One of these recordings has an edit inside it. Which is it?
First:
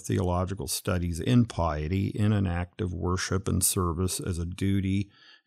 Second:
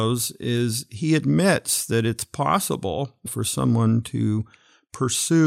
second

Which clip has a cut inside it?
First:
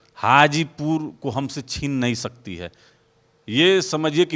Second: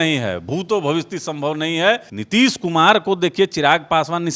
second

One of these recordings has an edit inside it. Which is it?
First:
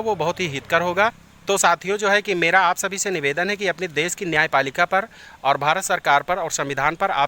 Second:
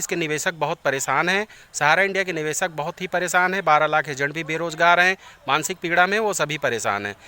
first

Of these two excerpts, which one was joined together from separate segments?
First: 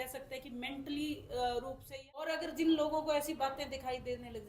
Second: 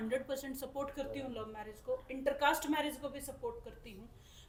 first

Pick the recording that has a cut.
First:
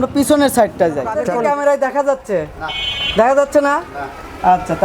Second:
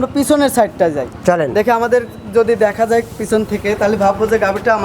first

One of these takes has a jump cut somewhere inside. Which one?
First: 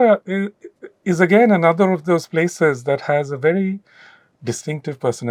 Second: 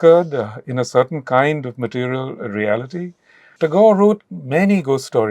second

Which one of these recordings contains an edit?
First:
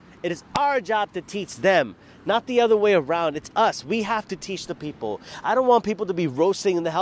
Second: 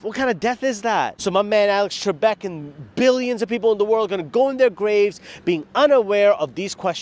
second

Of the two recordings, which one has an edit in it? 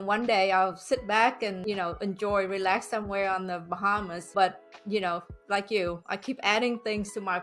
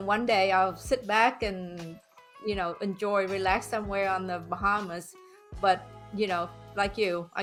first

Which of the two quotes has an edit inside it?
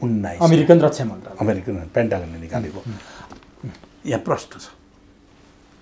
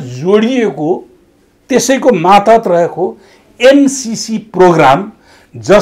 first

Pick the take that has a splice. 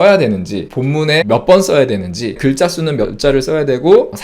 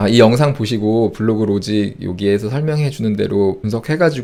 first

